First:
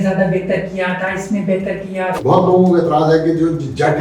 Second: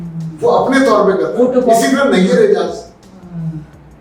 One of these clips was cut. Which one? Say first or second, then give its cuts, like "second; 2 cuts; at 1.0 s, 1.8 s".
first; 1 cut; at 2.2 s